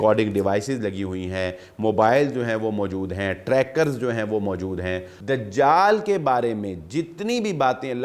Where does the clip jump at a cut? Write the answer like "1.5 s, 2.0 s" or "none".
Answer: 5.1 s